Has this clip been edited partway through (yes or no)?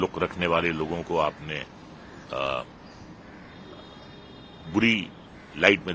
no